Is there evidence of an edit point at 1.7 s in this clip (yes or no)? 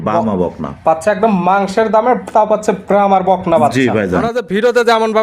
no